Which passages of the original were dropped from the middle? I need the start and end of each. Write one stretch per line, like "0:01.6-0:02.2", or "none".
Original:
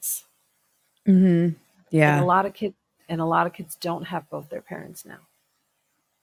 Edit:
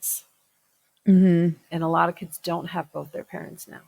0:01.7-0:03.0